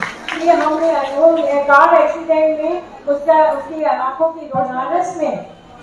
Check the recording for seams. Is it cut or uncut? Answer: cut